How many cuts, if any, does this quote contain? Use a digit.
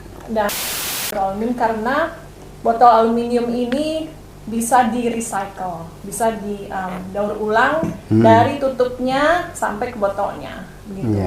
1